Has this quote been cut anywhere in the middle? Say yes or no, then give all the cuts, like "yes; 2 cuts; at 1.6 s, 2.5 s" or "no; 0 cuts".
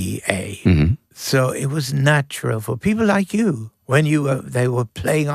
yes; 2 cuts; at 1.1 s, 3.7 s